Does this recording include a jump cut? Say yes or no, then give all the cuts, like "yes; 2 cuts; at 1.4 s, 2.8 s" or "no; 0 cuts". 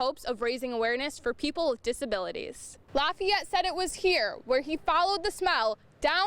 yes; 1 cut; at 2.7 s